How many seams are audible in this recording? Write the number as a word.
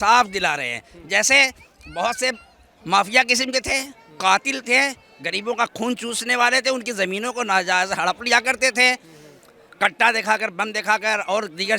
zero